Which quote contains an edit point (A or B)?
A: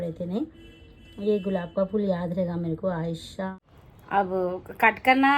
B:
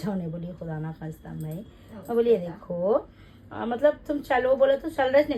A